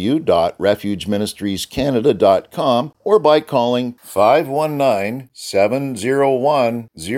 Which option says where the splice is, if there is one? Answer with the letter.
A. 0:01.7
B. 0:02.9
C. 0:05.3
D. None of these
B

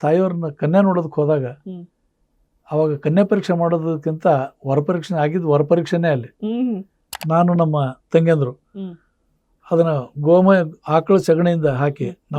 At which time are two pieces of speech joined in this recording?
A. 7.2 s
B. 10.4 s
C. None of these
A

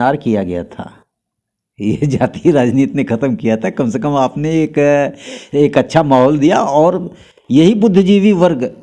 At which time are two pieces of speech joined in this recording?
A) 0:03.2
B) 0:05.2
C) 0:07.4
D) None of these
D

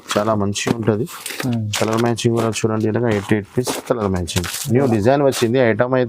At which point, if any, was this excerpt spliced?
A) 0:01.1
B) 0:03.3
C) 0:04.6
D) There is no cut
C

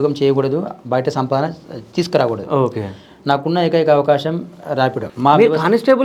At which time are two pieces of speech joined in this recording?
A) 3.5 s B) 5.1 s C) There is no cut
B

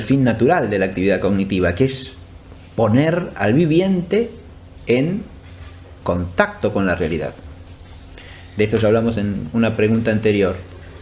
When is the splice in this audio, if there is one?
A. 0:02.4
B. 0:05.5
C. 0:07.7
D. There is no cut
A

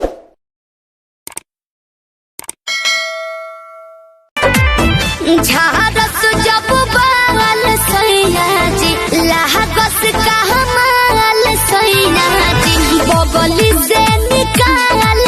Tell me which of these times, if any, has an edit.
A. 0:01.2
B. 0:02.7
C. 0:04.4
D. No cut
C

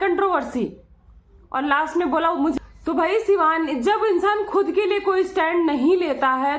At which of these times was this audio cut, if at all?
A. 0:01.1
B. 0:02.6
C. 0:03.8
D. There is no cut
B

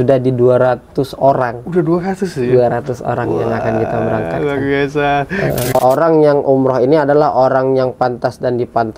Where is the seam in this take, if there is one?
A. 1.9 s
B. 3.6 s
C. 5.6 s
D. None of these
C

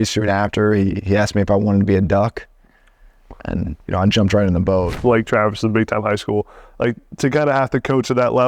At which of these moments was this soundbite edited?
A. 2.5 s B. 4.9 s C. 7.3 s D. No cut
B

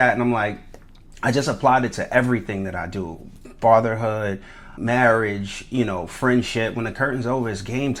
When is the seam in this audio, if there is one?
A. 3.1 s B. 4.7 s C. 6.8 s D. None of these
B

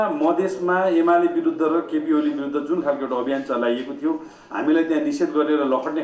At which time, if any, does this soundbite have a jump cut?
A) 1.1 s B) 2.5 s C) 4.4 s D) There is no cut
D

